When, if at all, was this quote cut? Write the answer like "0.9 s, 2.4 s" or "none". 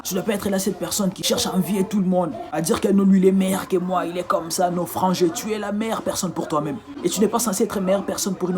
1.2 s